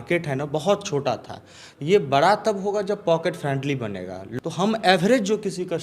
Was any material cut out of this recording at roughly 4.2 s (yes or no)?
yes